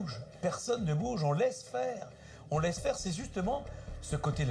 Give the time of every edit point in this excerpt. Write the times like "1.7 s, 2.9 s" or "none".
none